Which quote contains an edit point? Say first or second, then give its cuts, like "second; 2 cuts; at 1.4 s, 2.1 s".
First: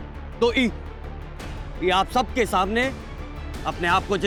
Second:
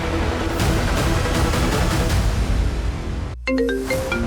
second; 1 cut; at 3.3 s